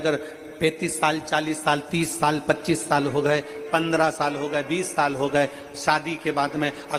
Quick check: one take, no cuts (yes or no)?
yes